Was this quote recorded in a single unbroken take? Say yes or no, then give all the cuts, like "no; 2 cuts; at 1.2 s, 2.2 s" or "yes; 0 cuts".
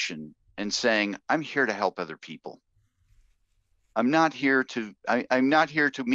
yes; 0 cuts